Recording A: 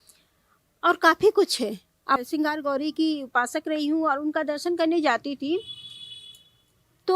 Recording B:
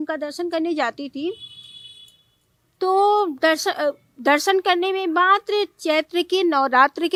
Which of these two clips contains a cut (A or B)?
A